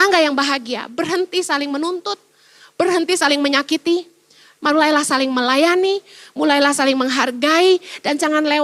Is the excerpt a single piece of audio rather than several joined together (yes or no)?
yes